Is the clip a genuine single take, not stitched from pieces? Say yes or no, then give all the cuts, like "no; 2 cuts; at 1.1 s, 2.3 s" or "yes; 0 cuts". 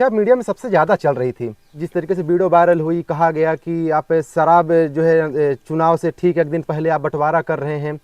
no; 1 cut; at 1.8 s